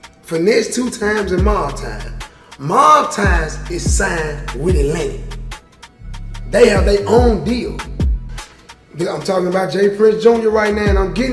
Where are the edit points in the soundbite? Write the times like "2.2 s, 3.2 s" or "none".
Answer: 8.2 s